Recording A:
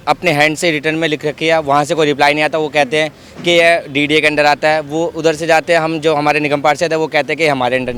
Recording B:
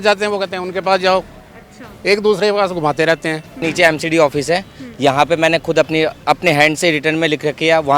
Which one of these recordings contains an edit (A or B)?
B